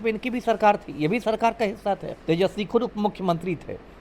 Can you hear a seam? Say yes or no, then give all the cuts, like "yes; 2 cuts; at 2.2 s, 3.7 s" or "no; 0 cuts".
yes; 1 cut; at 2.1 s